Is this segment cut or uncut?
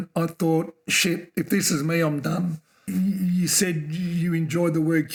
uncut